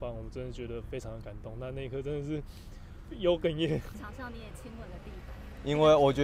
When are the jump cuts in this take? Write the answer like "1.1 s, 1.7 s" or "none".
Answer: 4.0 s

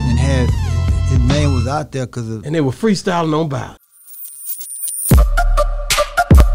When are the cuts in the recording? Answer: 3.8 s

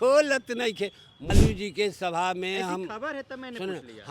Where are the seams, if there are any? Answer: 1.3 s

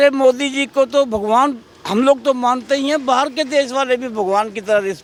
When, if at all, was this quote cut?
none

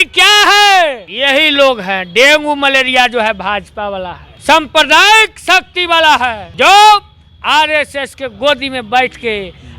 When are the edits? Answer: 1.1 s, 4.3 s, 6.4 s

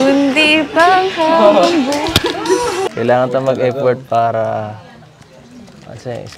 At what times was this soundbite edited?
2.9 s

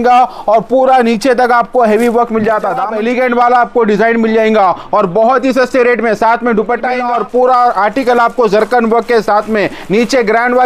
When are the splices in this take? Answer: 2.9 s, 7.0 s

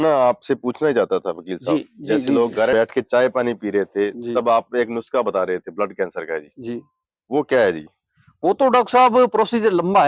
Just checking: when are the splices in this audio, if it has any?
2.7 s

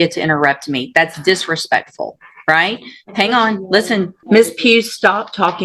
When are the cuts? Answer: 4.2 s

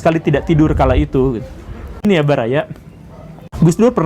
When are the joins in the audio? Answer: 2.0 s

